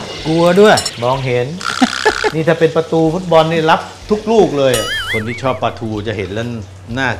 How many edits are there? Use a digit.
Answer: 2